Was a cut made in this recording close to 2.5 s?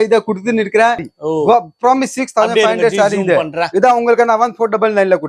no; 1 cut; at 1.0 s

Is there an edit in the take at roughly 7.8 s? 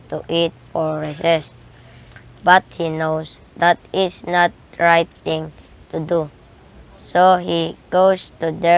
no; 1 cut; at 6.6 s

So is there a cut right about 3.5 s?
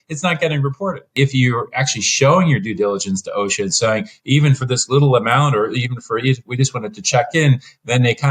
no; 1 cut; at 1.1 s

